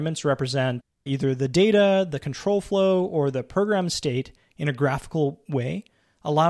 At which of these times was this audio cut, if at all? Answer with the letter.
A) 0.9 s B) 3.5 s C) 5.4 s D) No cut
A